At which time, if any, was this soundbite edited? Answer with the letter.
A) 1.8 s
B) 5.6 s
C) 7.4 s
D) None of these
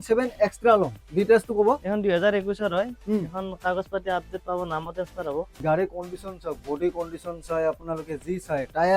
B